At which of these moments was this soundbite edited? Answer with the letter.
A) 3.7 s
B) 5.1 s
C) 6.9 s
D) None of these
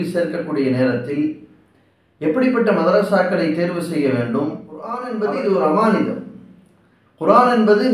B